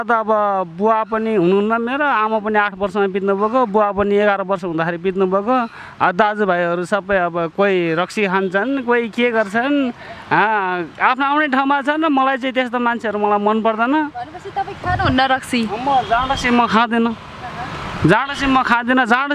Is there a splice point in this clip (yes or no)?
no